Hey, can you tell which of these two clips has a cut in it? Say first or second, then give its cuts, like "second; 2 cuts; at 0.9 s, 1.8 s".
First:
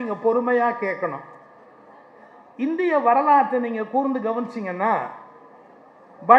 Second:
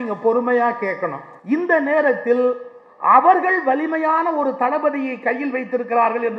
second; 1 cut; at 1.3 s